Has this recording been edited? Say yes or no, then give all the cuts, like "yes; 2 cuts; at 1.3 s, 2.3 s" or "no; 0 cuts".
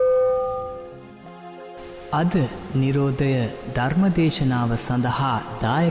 yes; 1 cut; at 1.0 s